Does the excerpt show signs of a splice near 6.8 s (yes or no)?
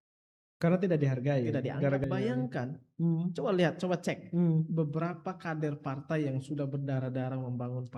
no